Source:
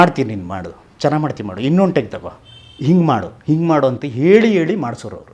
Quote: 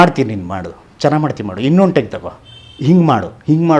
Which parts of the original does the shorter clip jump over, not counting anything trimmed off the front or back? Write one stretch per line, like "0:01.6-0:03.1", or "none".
none